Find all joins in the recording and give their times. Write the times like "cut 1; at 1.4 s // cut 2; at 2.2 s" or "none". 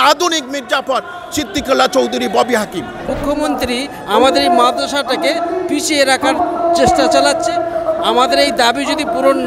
cut 1; at 3.1 s